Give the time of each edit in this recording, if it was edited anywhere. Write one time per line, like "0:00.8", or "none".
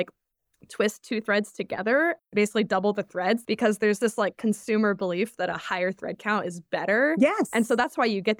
0:02.2
0:03.4